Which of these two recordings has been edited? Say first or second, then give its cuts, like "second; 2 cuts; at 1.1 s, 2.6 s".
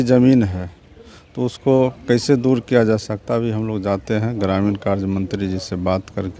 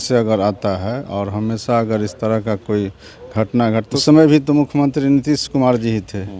second; 1 cut; at 3.9 s